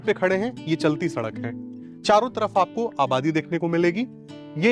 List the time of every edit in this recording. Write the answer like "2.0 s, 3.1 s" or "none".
none